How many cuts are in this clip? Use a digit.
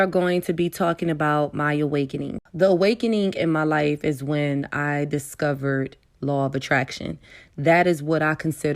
1